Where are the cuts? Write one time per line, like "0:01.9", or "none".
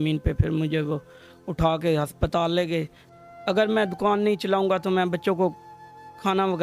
0:03.0